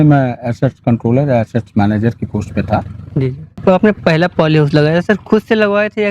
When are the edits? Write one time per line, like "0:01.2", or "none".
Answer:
0:03.6